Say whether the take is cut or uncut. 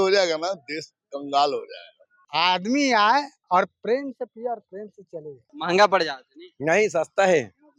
cut